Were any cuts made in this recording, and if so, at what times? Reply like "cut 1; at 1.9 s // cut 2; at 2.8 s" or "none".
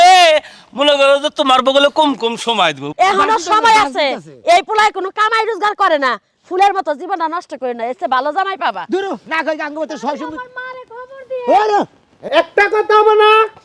cut 1; at 2.8 s // cut 2; at 12.1 s

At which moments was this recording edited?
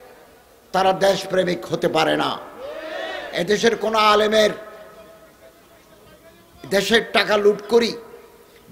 none

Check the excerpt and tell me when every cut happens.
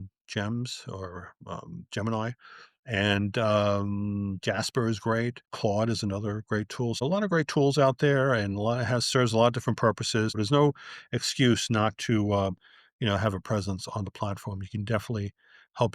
cut 1; at 5.5 s // cut 2; at 7.0 s // cut 3; at 10.4 s

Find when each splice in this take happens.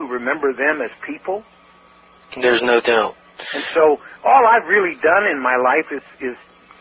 none

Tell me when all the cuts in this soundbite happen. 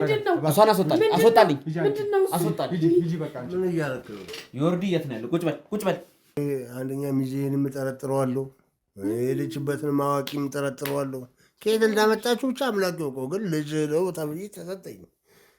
cut 1; at 6.4 s

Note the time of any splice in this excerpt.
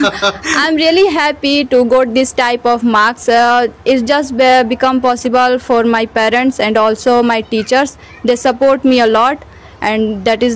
none

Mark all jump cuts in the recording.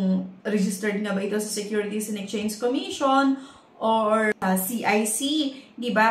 cut 1; at 4.4 s

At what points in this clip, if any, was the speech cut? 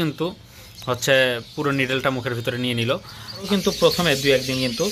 cut 1; at 3.5 s

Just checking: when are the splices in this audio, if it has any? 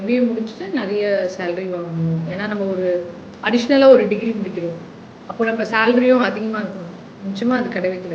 none

